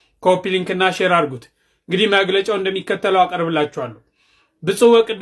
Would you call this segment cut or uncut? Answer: uncut